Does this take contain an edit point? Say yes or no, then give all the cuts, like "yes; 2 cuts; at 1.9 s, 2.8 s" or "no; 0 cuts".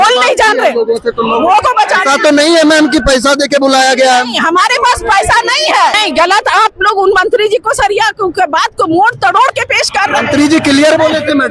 yes; 2 cuts; at 1.6 s, 6.0 s